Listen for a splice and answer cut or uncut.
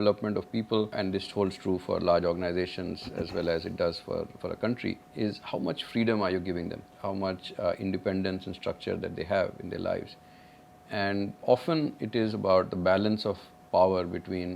cut